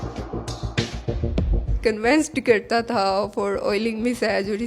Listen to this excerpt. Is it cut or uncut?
cut